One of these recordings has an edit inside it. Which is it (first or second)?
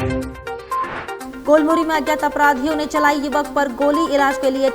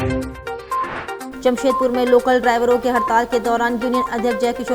first